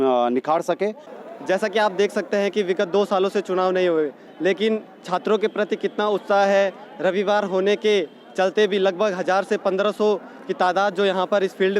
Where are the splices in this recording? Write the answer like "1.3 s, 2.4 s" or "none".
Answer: 1.1 s